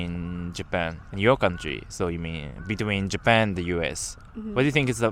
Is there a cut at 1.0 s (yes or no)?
yes